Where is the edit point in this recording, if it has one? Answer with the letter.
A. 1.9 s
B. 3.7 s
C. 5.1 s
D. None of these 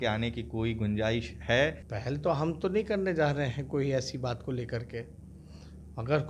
A